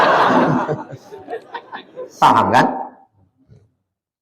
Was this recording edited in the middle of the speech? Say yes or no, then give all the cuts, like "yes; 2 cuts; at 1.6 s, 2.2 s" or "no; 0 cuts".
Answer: yes; 1 cut; at 2.1 s